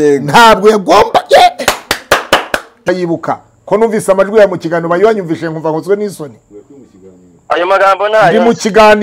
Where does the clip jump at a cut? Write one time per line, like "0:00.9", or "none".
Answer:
0:02.9